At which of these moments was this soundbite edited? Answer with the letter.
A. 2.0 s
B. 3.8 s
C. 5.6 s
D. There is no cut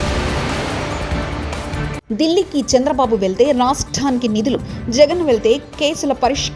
A